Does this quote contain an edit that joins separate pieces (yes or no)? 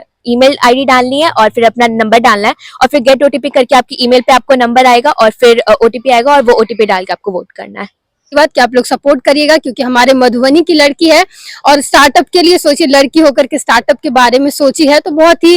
yes